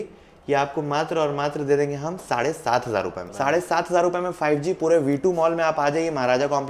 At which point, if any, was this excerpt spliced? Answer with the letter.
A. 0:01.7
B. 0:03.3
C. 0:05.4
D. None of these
B